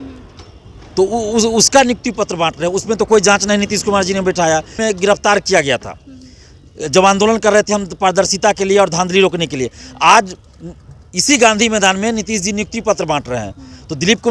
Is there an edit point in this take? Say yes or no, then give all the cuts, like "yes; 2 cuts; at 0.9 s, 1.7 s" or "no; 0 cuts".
yes; 1 cut; at 4.8 s